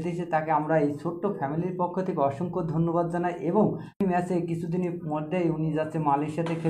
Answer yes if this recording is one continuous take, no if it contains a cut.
no